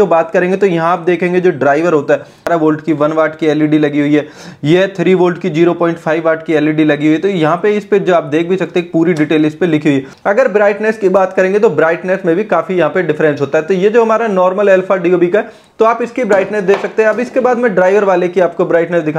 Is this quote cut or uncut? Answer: cut